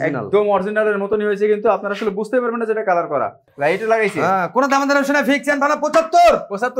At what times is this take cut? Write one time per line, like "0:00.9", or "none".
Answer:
0:03.4